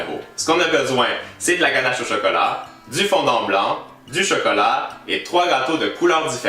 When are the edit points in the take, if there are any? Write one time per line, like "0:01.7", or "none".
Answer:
0:05.2